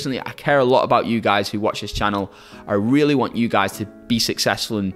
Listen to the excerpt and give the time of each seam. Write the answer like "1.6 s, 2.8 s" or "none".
none